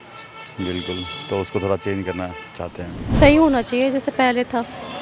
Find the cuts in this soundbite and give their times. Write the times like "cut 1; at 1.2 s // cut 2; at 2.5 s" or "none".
cut 1; at 3.0 s